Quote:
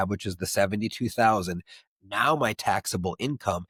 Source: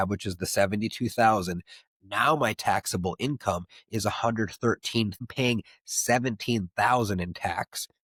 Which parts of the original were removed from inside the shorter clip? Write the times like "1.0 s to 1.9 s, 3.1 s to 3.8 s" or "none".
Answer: none